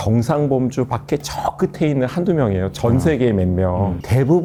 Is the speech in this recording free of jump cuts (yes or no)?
yes